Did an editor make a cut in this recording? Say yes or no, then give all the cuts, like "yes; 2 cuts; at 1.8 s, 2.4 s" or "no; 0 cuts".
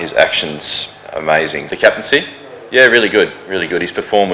yes; 1 cut; at 1.7 s